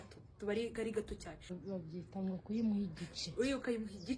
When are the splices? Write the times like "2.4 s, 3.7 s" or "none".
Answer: 1.6 s